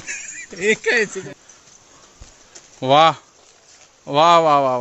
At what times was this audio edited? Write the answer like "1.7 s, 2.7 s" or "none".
1.2 s